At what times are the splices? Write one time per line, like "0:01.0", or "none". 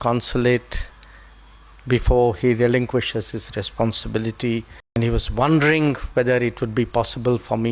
0:05.0